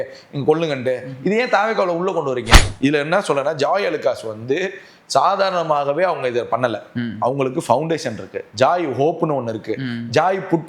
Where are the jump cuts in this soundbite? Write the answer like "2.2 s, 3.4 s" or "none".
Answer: 2.6 s